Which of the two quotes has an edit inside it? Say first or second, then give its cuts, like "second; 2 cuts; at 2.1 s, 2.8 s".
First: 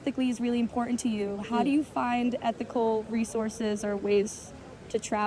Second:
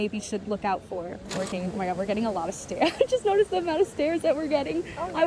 second; 1 cut; at 1.3 s